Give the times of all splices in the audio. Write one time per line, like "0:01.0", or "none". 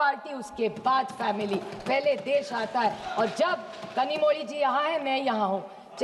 none